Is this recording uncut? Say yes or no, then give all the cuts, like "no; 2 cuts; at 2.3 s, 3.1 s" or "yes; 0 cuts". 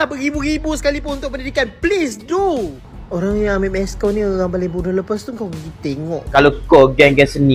no; 1 cut; at 6.2 s